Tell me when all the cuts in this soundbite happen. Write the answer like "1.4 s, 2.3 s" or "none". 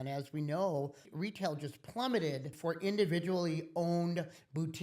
1.1 s, 2.5 s